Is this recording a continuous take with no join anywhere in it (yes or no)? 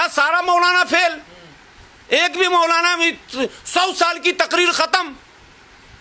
yes